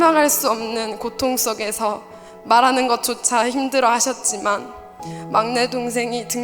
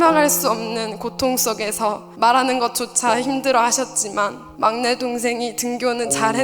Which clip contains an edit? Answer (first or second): second